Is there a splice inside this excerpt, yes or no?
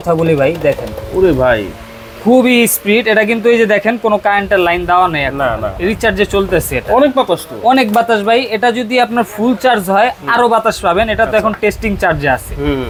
no